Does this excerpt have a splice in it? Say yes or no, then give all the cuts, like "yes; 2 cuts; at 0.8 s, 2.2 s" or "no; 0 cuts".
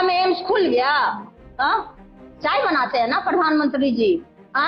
yes; 1 cut; at 2.0 s